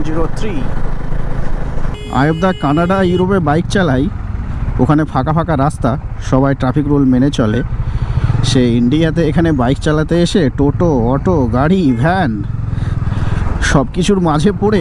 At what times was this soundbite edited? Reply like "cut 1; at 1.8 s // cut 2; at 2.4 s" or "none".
cut 1; at 2.0 s